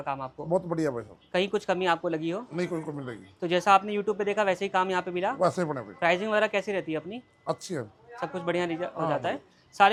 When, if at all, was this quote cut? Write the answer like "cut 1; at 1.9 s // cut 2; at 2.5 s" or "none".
none